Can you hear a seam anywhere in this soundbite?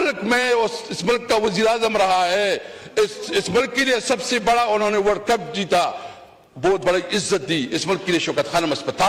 no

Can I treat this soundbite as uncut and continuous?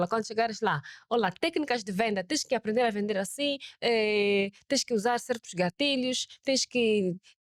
yes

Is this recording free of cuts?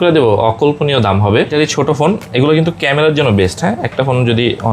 no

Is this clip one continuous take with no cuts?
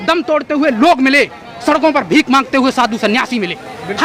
yes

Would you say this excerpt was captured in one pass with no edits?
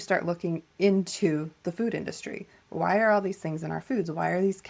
yes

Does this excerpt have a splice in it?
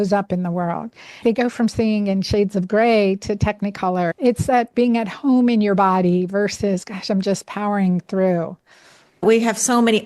yes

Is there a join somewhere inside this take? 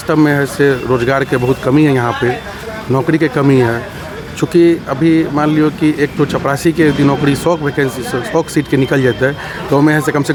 no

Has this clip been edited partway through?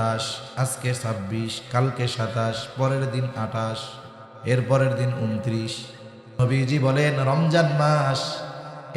yes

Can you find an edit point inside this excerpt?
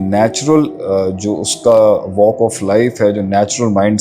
no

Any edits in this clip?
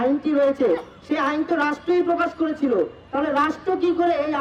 no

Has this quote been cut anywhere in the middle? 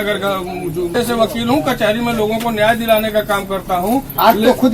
yes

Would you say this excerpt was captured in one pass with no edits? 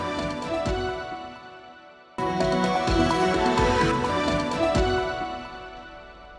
no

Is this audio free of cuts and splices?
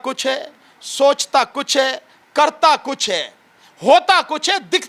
yes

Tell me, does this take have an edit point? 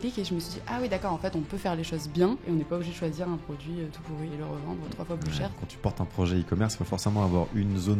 yes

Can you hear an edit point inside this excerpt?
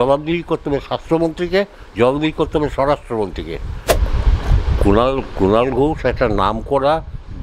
yes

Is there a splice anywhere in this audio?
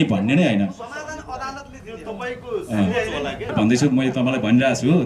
yes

